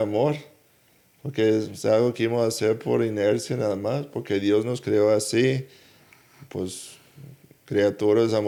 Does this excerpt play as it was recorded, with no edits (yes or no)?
yes